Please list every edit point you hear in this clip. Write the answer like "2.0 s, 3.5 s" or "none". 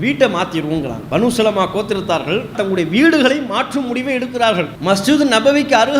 1.0 s, 2.6 s, 4.7 s

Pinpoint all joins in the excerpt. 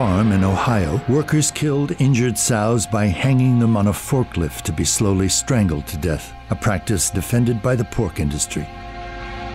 5.1 s

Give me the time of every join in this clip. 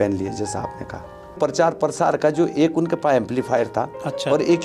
1.4 s

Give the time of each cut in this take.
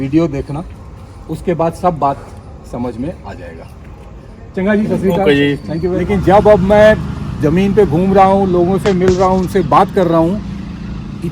5.6 s

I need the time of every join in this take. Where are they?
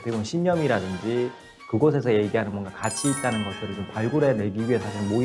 none

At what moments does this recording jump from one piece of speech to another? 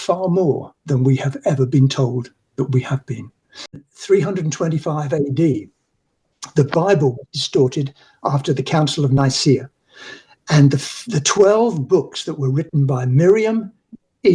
3.9 s

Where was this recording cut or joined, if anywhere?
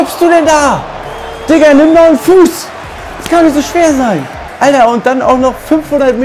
4.4 s

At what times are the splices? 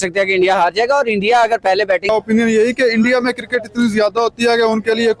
2.1 s

